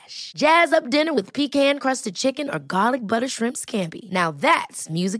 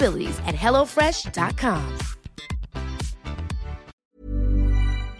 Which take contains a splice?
second; 1 cut; at 3.9 s

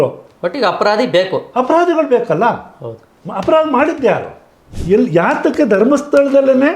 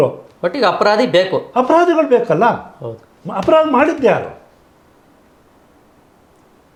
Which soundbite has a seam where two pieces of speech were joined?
first; 1 cut; at 4.7 s

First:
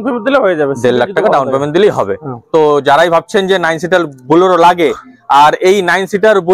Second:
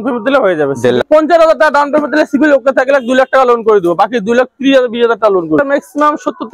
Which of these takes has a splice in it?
second; 2 cuts; at 1.1 s, 5.6 s

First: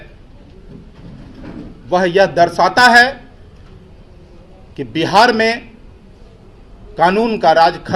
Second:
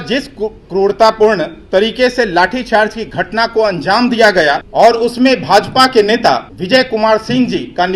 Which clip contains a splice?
second; 2 cuts; at 4.7 s, 6.5 s

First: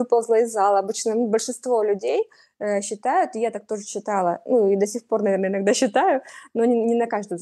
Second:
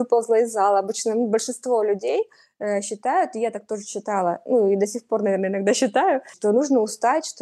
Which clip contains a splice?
second; 1 cut; at 6.3 s

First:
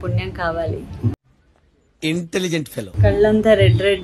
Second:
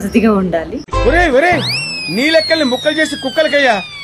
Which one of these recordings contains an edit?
first; 1 cut; at 2.9 s

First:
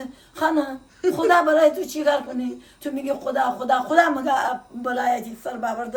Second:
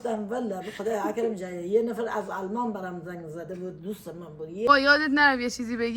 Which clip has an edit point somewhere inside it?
second; 1 cut; at 4.7 s

